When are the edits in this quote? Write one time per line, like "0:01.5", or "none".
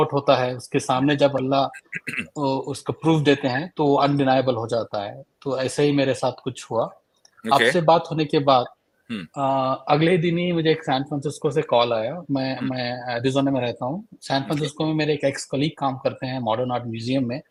none